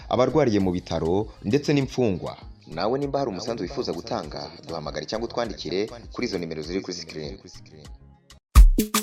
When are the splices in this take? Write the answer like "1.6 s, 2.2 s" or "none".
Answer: none